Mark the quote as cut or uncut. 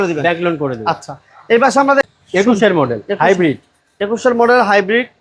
cut